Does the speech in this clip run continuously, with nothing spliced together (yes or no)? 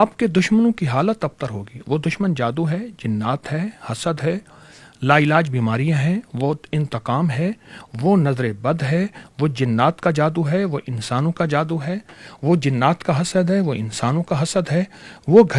yes